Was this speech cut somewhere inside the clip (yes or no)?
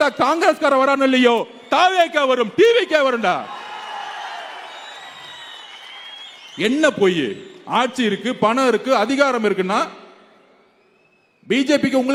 no